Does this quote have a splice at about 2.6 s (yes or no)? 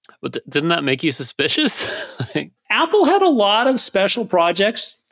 yes